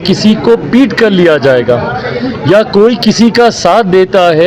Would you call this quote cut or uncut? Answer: uncut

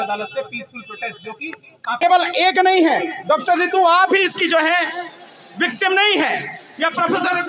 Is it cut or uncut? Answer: cut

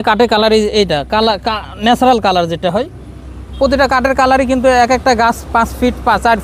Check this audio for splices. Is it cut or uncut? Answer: uncut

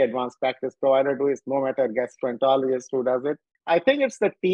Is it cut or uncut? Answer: cut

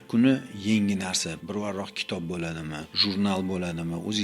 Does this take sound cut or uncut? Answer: cut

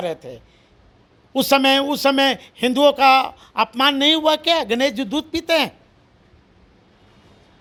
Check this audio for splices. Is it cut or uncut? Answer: uncut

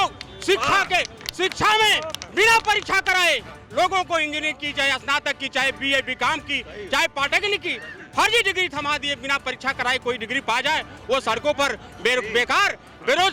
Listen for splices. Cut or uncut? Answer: uncut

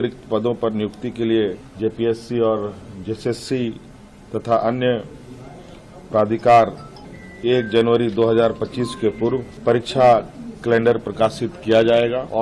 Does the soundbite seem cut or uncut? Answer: uncut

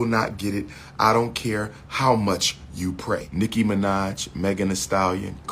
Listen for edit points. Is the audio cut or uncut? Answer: cut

